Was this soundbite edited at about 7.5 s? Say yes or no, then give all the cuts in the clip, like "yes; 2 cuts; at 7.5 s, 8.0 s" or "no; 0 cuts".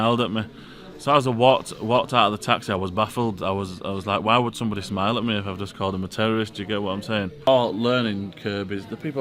yes; 1 cut; at 7.5 s